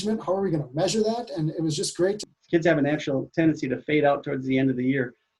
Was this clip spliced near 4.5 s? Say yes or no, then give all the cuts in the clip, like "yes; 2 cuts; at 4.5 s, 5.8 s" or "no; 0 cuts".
no; 1 cut; at 2.2 s